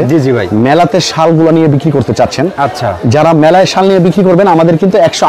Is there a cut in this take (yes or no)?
no